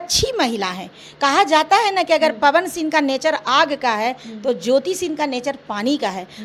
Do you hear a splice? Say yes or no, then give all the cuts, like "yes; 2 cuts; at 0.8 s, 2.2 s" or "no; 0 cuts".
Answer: no; 0 cuts